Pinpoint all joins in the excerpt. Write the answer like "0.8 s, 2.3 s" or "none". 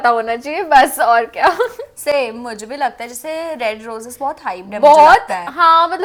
none